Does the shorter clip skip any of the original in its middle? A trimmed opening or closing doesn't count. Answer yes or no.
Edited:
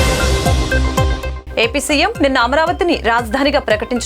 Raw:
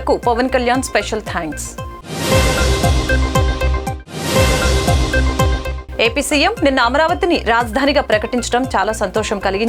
yes